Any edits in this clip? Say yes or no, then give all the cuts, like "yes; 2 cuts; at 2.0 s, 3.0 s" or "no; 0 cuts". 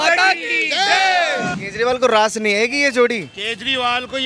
yes; 1 cut; at 1.5 s